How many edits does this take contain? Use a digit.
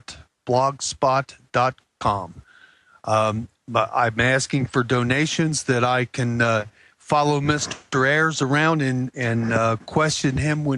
1